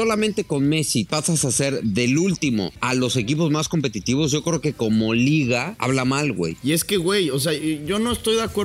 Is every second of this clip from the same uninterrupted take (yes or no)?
no